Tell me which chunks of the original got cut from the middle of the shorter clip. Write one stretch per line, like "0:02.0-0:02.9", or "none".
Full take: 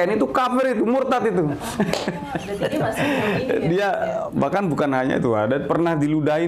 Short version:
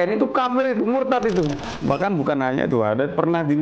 0:01.7-0:04.2